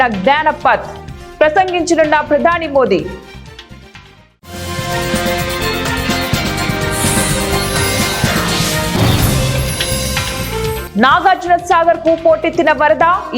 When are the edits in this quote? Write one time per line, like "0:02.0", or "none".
0:03.2
0:10.8